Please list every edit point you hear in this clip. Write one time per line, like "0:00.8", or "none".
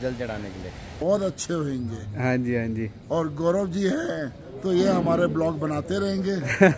0:01.0